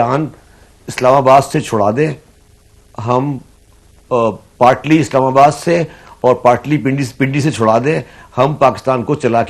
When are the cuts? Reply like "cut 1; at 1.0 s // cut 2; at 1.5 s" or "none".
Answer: none